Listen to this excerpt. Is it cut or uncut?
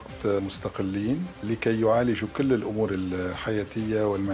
uncut